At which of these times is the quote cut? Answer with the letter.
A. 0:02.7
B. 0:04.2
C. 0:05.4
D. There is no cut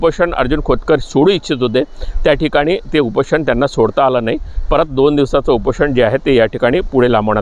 D